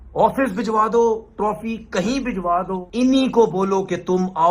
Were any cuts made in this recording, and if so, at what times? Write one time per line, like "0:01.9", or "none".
0:02.9